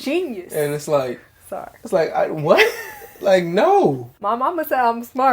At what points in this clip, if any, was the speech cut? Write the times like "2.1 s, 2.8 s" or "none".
4.1 s